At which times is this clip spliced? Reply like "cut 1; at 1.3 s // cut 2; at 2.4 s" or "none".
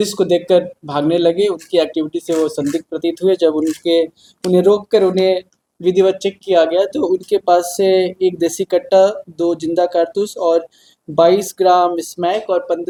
none